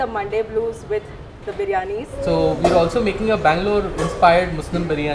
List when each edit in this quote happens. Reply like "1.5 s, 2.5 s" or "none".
2.1 s